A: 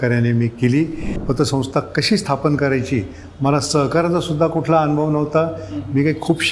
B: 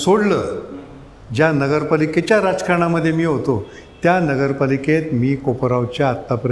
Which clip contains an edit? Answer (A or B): A